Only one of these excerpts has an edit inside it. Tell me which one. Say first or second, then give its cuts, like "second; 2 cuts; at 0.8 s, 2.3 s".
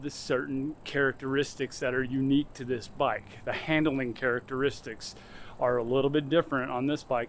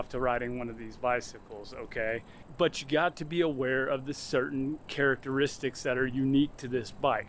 second; 1 cut; at 2.4 s